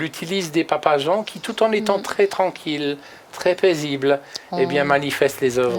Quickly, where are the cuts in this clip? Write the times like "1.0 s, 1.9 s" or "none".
none